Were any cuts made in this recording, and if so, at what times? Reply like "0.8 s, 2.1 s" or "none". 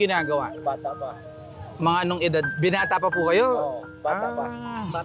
none